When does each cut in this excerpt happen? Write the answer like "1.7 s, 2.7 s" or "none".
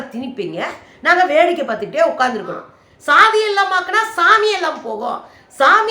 2.6 s